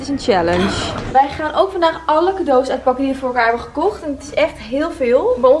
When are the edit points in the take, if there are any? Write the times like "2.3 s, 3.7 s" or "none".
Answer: 1.0 s